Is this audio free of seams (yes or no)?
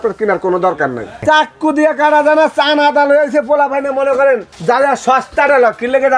no